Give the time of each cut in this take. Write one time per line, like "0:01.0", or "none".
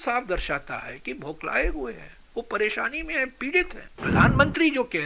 0:04.0